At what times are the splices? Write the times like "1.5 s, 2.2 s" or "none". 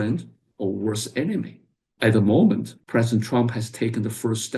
none